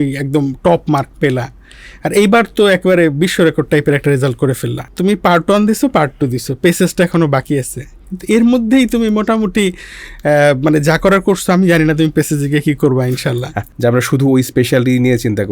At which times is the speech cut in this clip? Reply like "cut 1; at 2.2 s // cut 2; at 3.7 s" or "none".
cut 1; at 4.9 s // cut 2; at 13.6 s